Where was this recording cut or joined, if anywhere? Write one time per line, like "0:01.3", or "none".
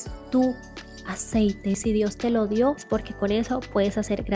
0:01.8
0:02.8